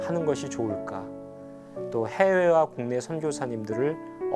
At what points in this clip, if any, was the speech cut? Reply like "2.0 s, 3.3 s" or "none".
none